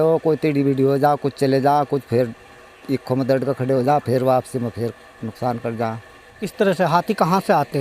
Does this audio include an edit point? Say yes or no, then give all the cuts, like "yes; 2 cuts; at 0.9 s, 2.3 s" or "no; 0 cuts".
yes; 1 cut; at 6.4 s